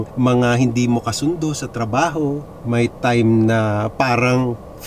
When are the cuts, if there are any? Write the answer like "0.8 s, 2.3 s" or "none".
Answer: 2.5 s